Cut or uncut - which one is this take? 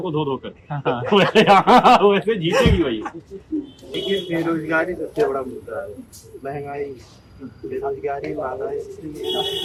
uncut